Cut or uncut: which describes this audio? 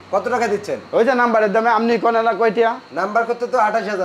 uncut